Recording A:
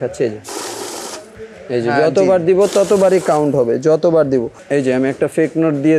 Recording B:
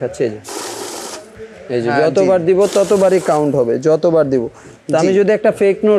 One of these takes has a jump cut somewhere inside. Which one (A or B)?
A